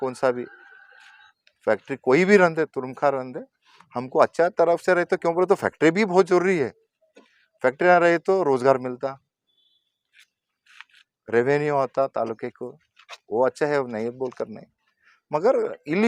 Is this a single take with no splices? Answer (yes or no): yes